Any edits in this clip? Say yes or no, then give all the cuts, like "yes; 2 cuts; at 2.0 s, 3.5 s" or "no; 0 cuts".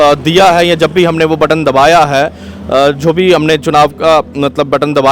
no; 0 cuts